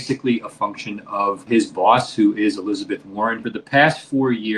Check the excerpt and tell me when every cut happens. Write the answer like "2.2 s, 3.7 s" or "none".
1.4 s, 3.5 s